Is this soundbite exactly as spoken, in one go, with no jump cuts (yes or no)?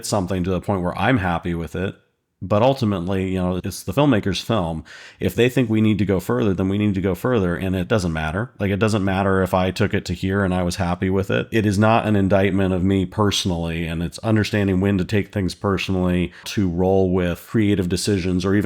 no